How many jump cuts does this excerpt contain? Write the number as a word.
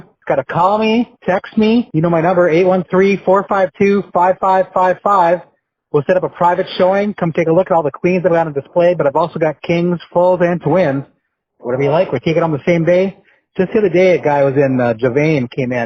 zero